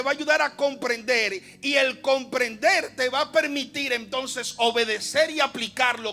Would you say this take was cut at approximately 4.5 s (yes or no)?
no